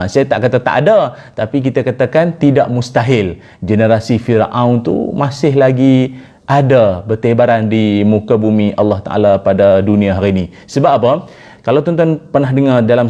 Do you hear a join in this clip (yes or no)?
no